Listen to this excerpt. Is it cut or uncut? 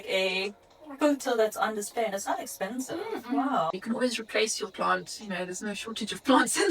cut